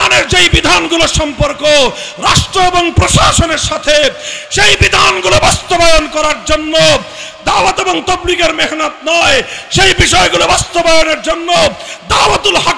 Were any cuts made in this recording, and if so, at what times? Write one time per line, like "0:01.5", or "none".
none